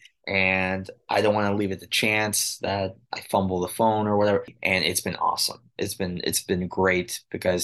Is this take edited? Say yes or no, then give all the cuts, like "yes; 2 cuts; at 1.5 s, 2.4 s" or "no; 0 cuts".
yes; 1 cut; at 4.5 s